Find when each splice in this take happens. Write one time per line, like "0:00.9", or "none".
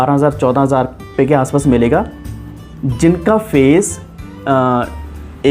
none